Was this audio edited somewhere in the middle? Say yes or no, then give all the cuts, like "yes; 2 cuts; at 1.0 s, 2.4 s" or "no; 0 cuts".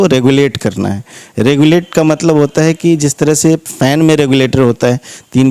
no; 0 cuts